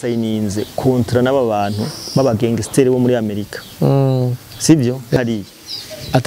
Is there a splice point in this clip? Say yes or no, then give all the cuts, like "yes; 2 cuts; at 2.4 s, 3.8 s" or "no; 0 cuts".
yes; 1 cut; at 5.2 s